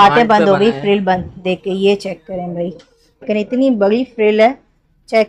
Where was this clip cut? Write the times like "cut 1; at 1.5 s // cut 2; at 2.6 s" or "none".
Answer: cut 1; at 3.2 s